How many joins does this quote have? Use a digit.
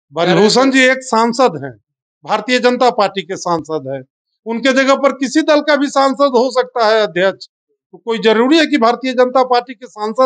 0